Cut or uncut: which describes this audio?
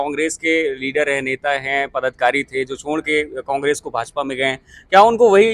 uncut